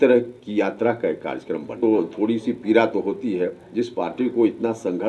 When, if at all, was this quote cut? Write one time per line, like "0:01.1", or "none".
0:01.7

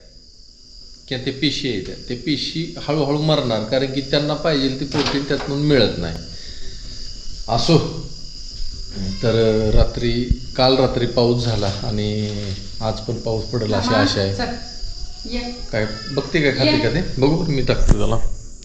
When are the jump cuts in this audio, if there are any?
none

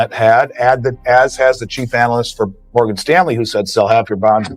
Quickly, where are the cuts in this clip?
0:02.6

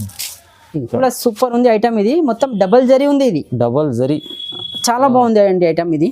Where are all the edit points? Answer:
0:01.0

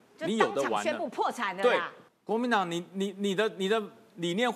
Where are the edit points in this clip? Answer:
0:02.0

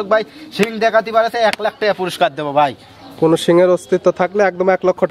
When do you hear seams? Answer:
none

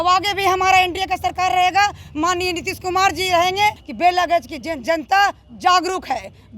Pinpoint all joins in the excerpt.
0:03.9

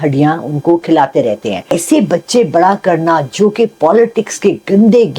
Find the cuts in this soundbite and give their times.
0:01.7

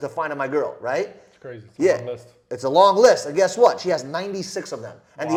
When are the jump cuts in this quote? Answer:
none

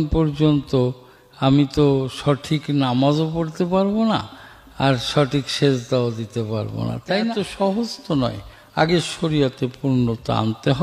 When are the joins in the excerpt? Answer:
0:07.4

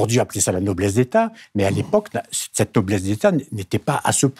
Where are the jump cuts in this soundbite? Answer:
none

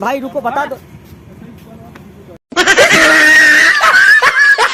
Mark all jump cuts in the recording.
none

